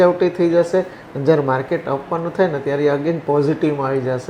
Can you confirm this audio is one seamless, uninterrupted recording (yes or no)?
yes